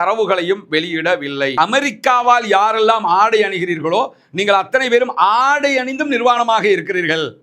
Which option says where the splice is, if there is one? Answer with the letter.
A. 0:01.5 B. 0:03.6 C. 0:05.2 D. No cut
A